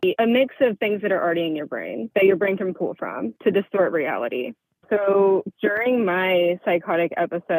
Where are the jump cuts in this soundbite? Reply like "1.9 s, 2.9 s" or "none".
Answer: 2.0 s, 3.3 s